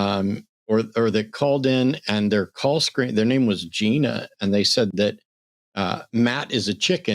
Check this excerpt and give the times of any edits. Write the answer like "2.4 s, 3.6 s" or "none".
none